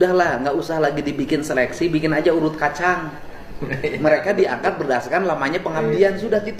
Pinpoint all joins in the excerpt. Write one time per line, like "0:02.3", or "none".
none